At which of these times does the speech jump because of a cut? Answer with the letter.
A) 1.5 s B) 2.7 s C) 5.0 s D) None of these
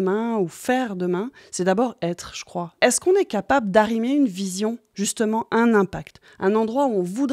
B